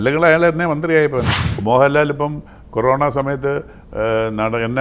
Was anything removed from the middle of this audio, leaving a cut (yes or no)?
yes